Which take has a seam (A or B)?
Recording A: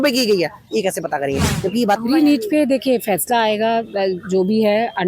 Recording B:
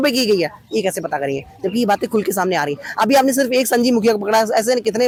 A